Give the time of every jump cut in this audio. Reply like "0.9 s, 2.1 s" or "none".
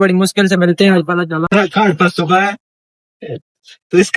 1.4 s